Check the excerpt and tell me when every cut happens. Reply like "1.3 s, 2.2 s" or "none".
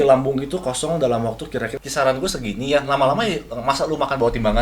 1.8 s